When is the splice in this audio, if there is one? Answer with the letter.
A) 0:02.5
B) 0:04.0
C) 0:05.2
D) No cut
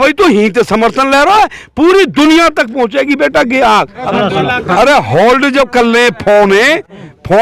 B